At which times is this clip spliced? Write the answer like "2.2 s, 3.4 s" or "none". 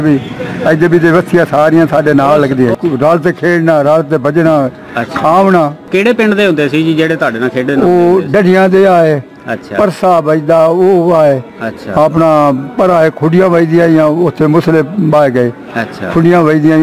2.7 s